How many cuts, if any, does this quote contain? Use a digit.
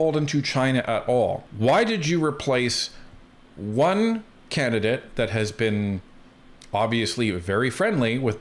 1